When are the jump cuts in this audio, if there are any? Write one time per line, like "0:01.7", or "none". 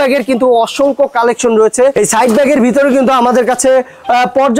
0:01.9